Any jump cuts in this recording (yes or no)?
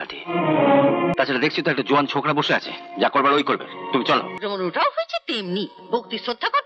yes